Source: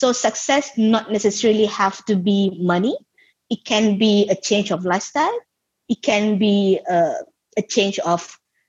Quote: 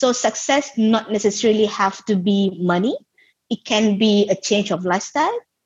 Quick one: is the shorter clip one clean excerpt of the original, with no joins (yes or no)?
yes